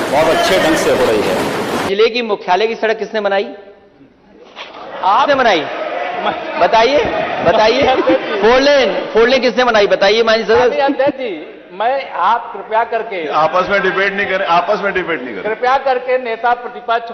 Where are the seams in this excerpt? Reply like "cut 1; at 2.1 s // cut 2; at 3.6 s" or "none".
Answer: cut 1; at 1.9 s